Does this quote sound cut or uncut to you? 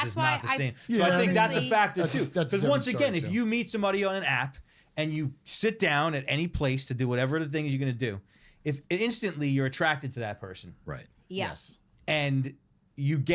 uncut